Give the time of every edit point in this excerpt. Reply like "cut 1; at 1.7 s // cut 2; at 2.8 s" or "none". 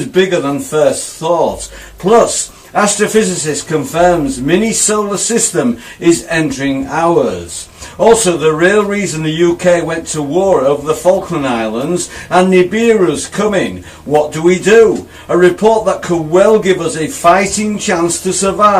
none

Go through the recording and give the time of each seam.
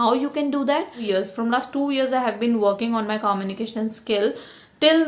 cut 1; at 1.0 s

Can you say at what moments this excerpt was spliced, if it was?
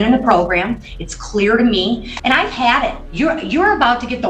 cut 1; at 2.1 s // cut 2; at 3.0 s

